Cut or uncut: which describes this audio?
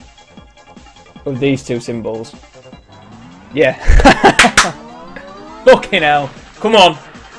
cut